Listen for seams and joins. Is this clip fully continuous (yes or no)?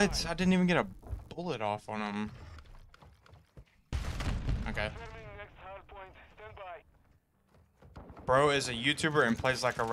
no